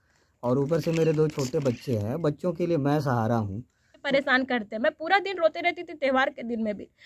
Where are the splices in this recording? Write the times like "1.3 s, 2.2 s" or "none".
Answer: 4.0 s